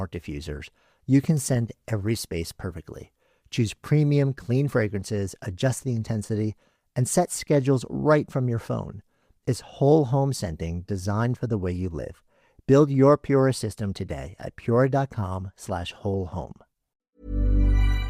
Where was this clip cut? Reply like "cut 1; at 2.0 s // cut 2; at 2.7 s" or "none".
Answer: cut 1; at 17.1 s